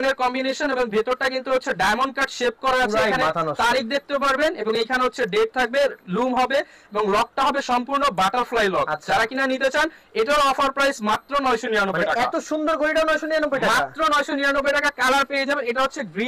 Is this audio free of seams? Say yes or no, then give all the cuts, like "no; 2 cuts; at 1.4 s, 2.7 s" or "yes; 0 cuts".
yes; 0 cuts